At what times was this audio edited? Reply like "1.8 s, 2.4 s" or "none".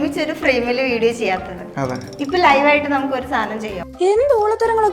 3.8 s